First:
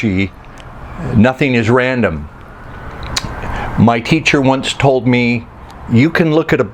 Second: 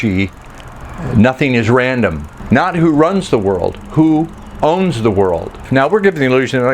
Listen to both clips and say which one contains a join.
second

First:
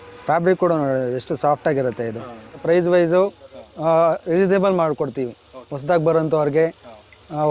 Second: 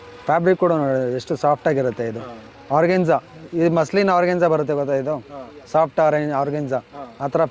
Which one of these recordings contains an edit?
first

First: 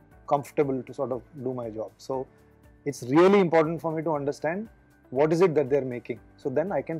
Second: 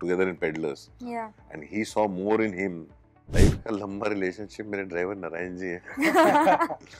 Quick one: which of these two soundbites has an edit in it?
second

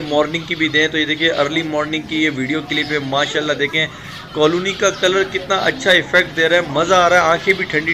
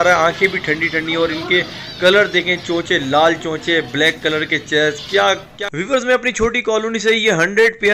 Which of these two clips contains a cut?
second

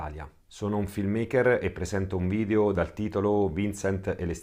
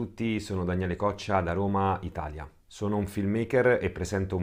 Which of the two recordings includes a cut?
first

